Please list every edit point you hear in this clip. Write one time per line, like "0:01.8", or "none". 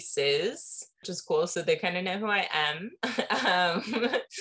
none